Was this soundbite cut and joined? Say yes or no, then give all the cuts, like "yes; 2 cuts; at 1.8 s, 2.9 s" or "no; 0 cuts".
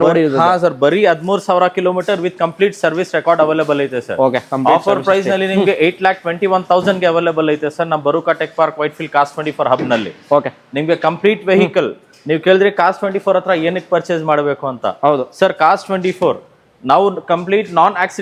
no; 0 cuts